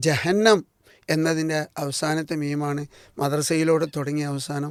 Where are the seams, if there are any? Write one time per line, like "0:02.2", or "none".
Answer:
none

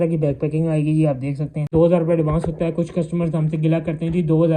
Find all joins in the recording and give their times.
0:01.7

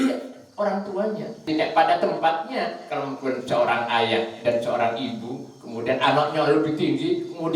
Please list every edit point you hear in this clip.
0:01.4

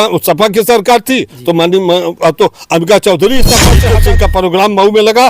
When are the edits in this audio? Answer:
0:03.8

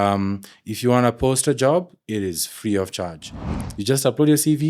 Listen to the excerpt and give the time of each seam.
0:03.4

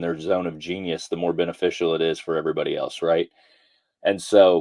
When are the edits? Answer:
none

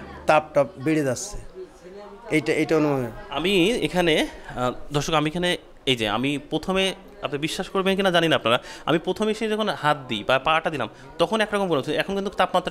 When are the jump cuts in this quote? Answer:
none

